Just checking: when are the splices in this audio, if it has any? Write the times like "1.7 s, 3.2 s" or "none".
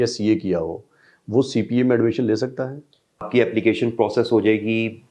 3.3 s

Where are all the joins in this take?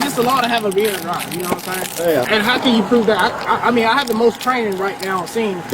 2.3 s

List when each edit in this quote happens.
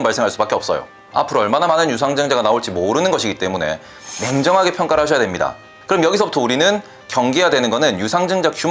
1.0 s, 4.0 s, 5.7 s

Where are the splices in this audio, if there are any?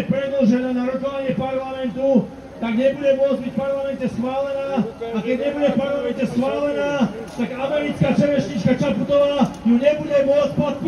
none

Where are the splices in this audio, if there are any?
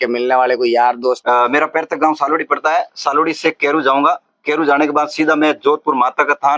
1.2 s

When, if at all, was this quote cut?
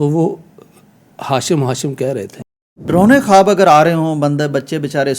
2.9 s

